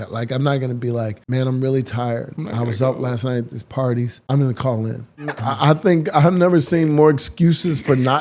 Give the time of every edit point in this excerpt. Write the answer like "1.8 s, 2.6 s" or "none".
1.2 s, 2.4 s, 4.2 s, 5.4 s